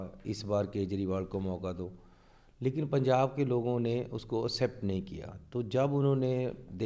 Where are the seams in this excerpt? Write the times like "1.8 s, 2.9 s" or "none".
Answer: none